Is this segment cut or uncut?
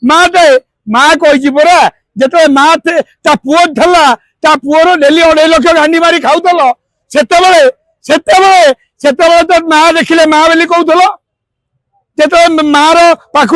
uncut